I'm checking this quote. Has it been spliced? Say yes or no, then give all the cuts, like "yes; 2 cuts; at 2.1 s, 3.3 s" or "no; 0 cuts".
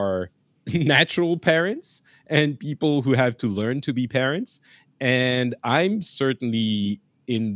no; 0 cuts